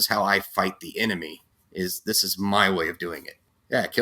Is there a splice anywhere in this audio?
no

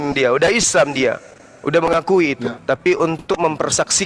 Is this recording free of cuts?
no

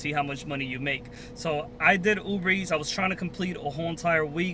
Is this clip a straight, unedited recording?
yes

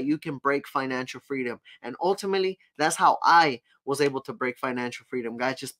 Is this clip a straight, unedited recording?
yes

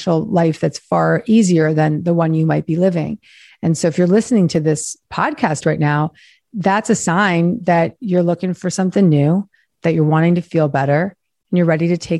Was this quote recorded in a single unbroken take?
yes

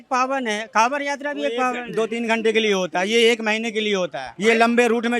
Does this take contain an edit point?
yes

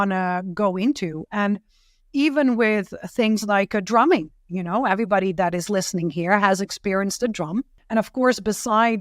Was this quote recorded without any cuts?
no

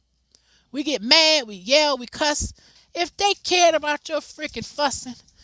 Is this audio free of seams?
no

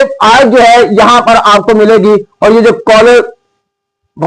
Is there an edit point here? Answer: no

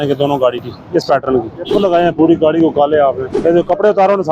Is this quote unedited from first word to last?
no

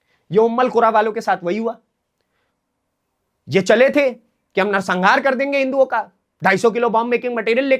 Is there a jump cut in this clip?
no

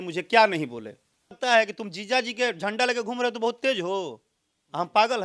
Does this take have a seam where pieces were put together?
yes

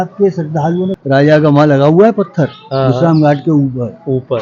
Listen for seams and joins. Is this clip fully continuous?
no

